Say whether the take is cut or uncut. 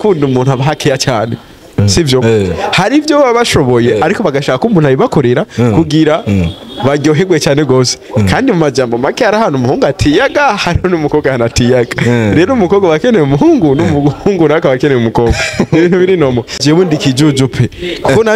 cut